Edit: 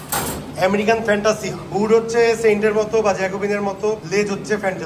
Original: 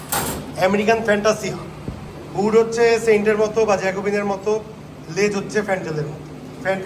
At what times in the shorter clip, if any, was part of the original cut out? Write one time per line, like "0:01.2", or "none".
0:01.6
0:04.0